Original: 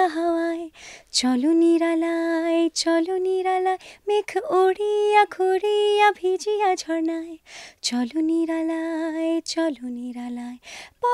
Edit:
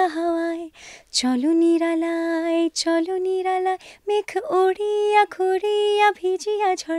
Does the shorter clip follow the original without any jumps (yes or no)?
yes